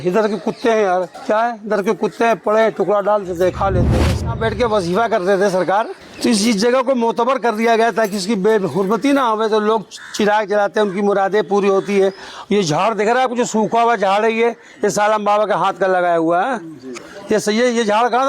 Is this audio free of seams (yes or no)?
no